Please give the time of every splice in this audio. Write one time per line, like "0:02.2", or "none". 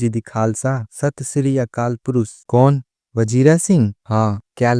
0:02.4